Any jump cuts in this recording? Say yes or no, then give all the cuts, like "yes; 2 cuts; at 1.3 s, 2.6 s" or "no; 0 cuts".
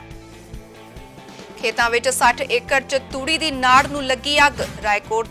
yes; 1 cut; at 1.3 s